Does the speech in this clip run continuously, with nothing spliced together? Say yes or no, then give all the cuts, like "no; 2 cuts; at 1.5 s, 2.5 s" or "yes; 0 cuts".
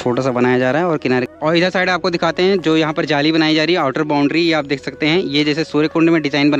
no; 1 cut; at 1.3 s